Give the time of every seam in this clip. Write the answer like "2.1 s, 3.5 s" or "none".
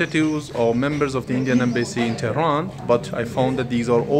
2.8 s

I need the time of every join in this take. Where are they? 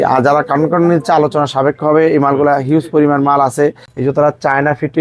3.9 s

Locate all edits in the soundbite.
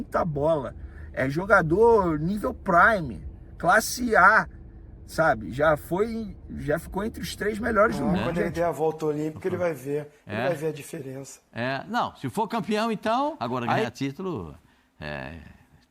8.4 s, 13.5 s

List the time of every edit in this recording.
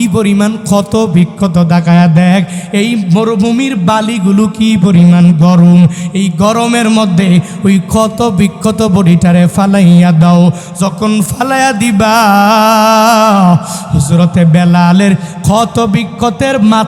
none

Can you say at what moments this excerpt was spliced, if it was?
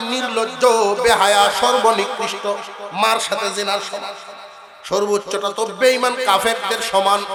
none

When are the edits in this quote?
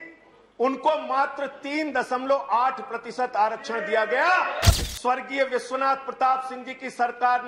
4.7 s

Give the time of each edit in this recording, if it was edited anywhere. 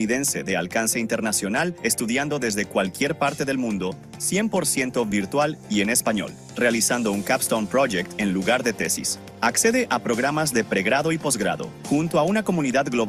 none

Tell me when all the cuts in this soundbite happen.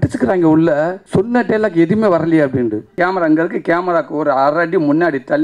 1.0 s, 2.8 s

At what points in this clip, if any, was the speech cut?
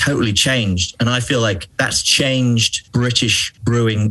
1.7 s, 2.8 s

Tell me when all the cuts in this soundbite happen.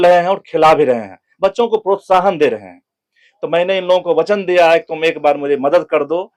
none

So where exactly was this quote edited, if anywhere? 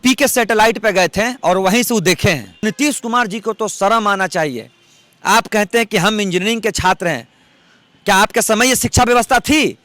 2.6 s

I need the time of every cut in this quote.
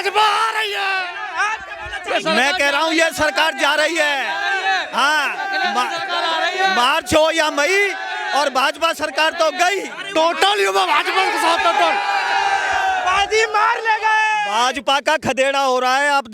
10.0 s

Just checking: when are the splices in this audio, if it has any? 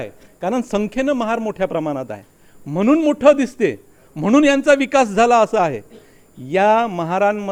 none

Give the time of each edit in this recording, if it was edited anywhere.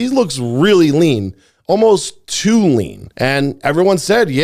none

